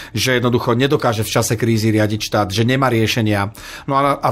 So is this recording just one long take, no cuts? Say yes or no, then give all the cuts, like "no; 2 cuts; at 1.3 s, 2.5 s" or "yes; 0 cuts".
yes; 0 cuts